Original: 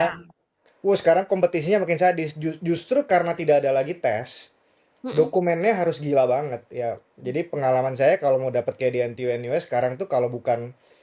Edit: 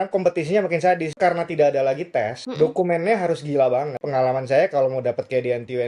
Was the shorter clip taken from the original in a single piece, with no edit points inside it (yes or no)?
no